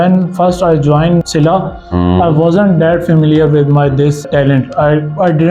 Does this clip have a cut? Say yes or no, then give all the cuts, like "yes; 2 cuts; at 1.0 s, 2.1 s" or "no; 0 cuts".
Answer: no; 0 cuts